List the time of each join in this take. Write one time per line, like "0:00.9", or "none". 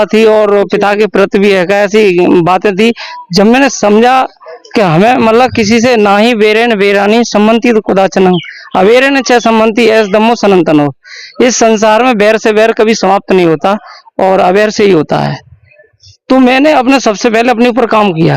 none